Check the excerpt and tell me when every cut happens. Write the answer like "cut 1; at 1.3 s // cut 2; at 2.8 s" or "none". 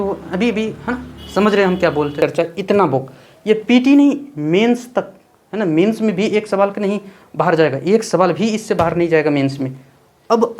cut 1; at 2.1 s

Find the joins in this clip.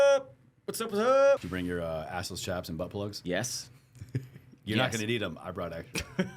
cut 1; at 1.4 s // cut 2; at 3.2 s

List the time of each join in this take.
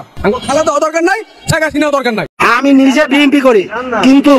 cut 1; at 2.3 s

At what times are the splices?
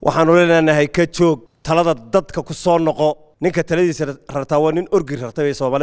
cut 1; at 1.5 s // cut 2; at 3.3 s

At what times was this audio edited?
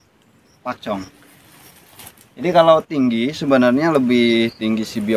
none

